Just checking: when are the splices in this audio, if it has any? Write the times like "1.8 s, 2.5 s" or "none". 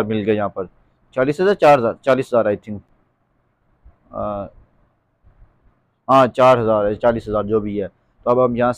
none

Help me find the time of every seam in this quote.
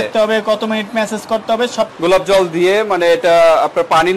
1.9 s

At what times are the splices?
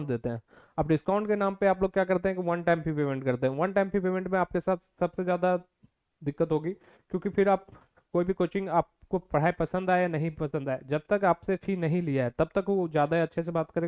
none

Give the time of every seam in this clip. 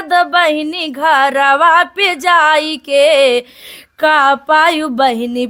none

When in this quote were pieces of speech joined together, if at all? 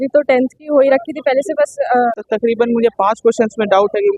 2.2 s

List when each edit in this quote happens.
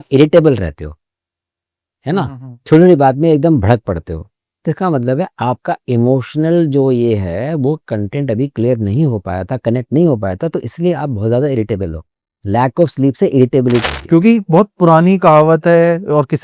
13.8 s

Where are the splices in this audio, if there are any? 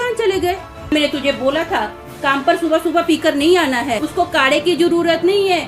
0.9 s, 4.0 s

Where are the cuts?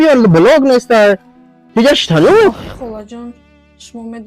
2.5 s

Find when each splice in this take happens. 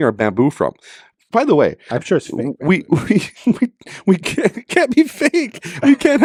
none

